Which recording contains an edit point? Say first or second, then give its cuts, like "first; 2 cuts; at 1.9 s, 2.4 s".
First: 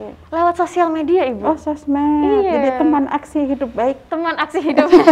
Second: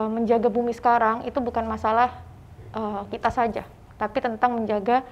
first; 1 cut; at 4.0 s